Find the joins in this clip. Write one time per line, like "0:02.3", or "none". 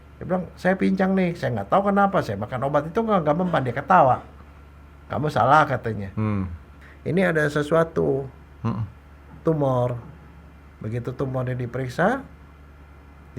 0:06.8